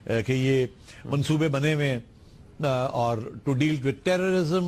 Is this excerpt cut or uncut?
cut